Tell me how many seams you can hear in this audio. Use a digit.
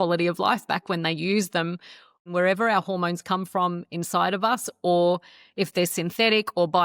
1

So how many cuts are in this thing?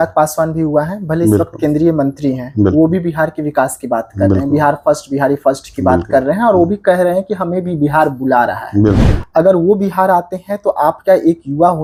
0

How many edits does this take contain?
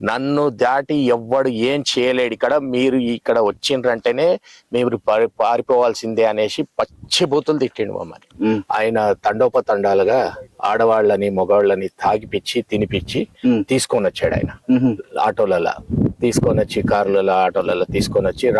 1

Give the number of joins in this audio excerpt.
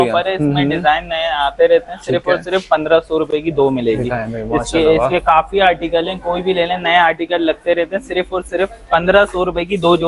0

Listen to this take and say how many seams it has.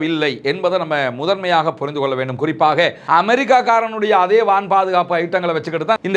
1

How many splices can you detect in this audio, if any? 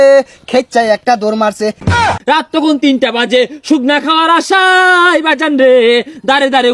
1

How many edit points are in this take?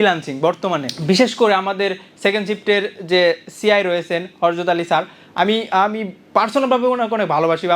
1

